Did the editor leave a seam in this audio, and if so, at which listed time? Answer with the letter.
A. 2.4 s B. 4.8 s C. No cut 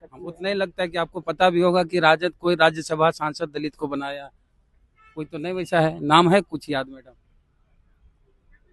C